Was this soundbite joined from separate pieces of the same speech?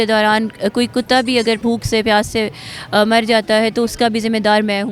yes; 1 cut; at 1.6 s

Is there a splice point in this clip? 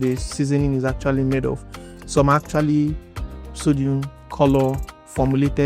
no; 0 cuts

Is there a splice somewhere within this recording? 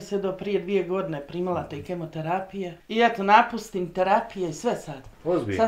yes; 1 cut; at 2.8 s

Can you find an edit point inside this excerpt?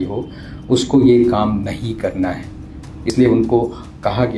yes; 1 cut; at 3.1 s

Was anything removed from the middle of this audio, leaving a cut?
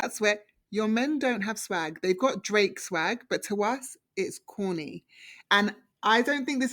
yes; 1 cut; at 5.4 s

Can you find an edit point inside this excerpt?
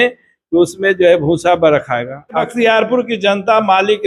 yes; 1 cut; at 2.5 s

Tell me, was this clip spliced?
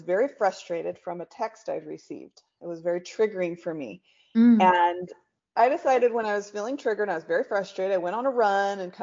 yes; 1 cut; at 5.4 s

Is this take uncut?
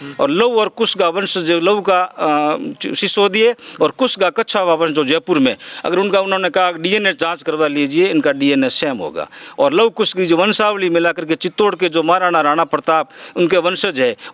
yes; 0 cuts

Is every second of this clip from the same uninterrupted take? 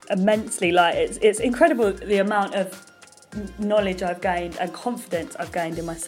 yes; 0 cuts

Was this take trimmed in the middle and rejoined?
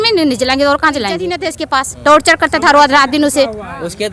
yes; 1 cut; at 1.4 s

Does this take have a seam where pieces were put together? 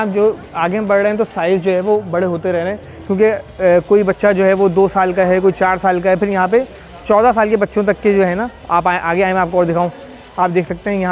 no; 0 cuts

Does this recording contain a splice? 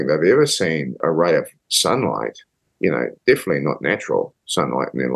yes; 2 cuts; at 1.0 s, 1.6 s

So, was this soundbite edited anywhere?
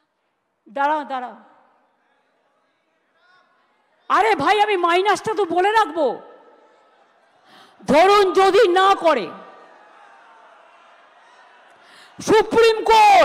no; 0 cuts

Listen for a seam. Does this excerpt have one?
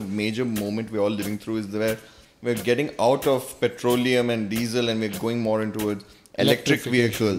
no; 0 cuts

